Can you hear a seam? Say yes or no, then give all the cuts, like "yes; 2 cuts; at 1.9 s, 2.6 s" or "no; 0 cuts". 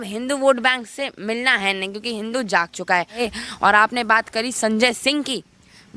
yes; 1 cut; at 3.2 s